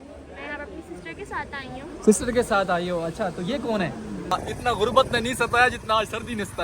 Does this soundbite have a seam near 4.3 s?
yes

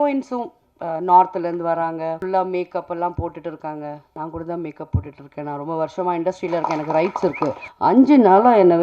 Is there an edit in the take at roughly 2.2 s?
yes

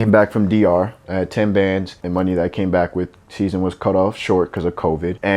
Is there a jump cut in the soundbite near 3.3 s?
no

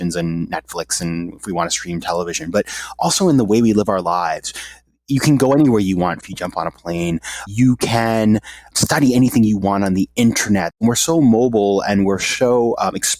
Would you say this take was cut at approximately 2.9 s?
no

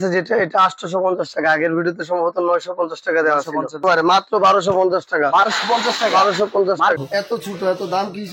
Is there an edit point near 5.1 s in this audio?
no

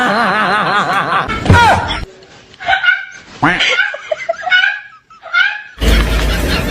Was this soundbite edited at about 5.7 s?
yes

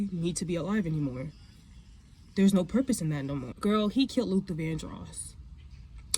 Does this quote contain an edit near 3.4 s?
yes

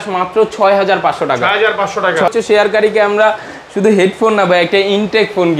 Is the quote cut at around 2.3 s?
yes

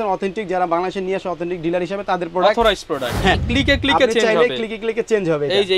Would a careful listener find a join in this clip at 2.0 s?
no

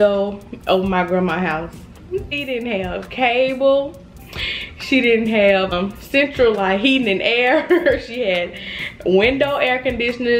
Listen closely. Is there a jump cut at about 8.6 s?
no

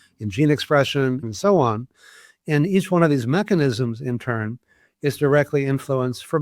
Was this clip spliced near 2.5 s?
no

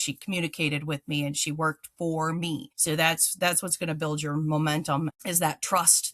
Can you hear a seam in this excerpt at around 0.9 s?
no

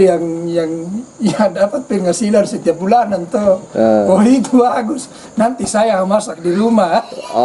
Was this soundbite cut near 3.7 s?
no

